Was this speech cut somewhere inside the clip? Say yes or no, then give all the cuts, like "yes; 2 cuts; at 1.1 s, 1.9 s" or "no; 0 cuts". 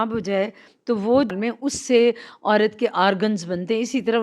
yes; 1 cut; at 1.3 s